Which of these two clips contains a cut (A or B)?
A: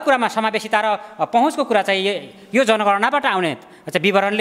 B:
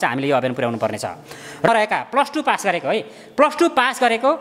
B